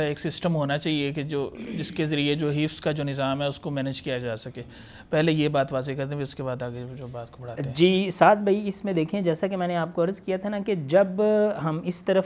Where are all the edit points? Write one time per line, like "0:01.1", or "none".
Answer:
none